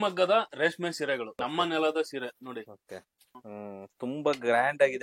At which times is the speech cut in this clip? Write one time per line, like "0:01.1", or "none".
0:01.4
0:03.4